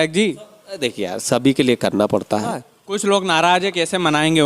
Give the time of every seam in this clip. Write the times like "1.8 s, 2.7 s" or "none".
2.7 s